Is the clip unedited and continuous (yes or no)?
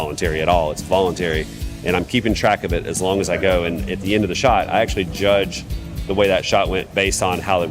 yes